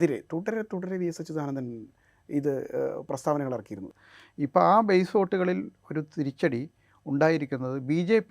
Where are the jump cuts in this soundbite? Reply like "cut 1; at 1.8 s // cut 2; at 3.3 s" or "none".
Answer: cut 1; at 3.8 s